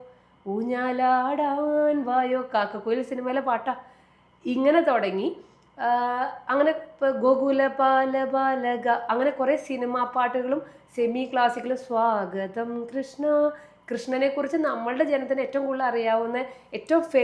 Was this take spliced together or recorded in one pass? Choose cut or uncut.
uncut